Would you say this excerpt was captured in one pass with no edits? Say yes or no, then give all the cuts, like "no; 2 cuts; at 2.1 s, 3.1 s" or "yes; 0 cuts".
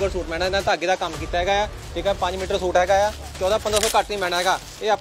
yes; 0 cuts